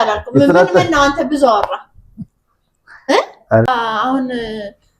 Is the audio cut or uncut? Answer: cut